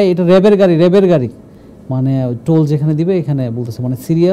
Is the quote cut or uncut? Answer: uncut